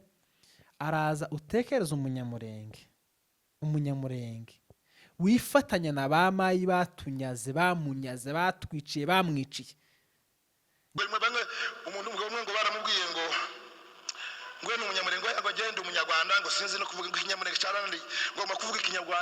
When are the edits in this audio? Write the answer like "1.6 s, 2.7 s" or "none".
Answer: 10.9 s